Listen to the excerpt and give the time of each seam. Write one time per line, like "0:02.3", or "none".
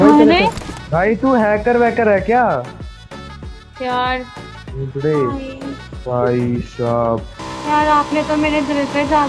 0:07.4